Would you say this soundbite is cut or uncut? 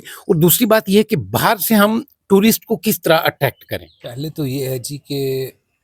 cut